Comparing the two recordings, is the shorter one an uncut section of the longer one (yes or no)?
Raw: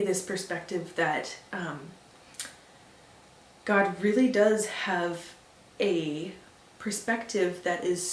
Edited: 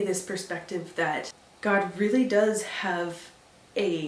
no